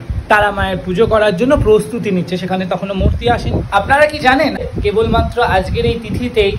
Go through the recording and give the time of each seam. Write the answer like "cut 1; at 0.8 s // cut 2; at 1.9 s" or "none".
cut 1; at 3.5 s // cut 2; at 4.7 s